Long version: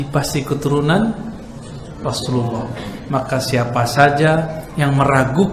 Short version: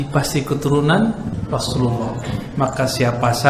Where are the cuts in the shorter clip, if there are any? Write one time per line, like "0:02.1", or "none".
0:01.4